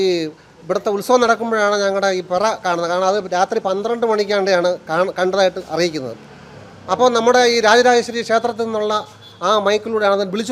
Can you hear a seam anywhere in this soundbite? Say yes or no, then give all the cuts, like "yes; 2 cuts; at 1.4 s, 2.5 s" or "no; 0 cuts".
no; 0 cuts